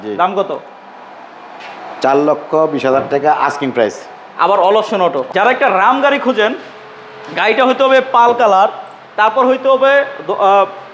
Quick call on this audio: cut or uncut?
cut